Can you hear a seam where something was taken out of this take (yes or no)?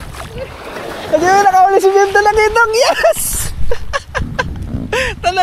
no